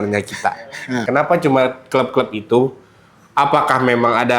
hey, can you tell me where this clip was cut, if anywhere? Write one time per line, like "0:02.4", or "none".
0:01.0